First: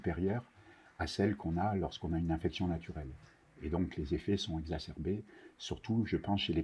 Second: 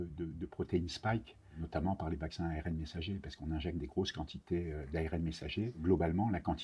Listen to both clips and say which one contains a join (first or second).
second